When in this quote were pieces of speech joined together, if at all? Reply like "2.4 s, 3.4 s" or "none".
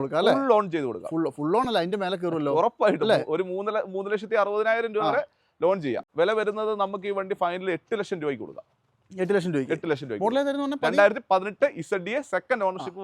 6.0 s